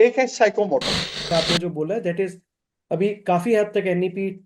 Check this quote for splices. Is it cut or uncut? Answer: cut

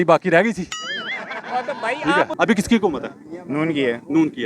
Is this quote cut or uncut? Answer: cut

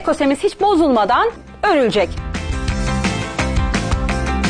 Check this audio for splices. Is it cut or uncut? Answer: cut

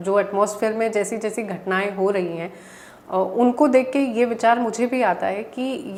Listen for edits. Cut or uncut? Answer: uncut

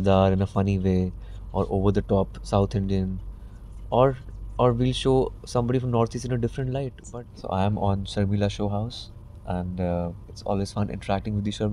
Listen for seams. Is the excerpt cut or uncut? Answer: cut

